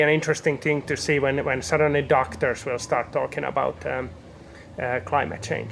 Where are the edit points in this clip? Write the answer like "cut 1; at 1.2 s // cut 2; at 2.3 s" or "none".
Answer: cut 1; at 1.0 s